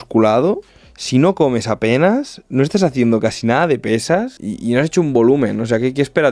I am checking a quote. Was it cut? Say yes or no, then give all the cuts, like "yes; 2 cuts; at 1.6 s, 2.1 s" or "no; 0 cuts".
no; 0 cuts